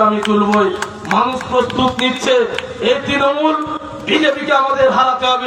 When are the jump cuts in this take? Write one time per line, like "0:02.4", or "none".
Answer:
none